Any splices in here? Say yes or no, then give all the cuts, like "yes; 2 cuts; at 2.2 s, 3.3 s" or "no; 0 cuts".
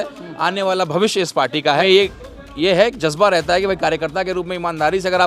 yes; 1 cut; at 1.8 s